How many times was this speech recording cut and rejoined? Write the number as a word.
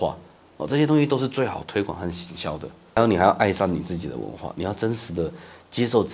one